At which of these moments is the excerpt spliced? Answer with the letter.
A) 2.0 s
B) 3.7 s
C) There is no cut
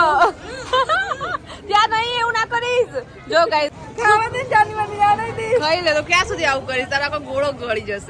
B